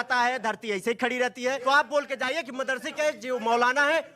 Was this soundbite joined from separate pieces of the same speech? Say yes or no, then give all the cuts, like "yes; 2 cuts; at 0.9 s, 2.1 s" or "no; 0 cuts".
yes; 1 cut; at 1.6 s